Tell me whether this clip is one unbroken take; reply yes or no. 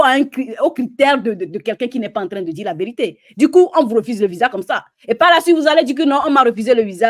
yes